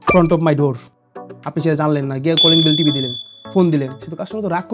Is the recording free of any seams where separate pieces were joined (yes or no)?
yes